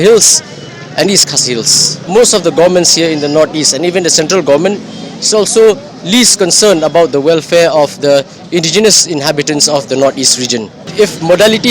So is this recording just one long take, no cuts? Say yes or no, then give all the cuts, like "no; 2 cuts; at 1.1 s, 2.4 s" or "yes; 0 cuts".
no; 2 cuts; at 2.1 s, 10.9 s